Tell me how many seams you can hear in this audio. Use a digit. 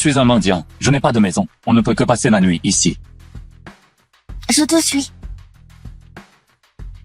3